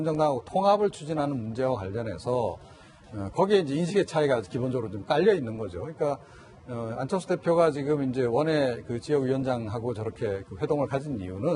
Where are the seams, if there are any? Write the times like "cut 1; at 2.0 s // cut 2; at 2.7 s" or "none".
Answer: cut 1; at 3.8 s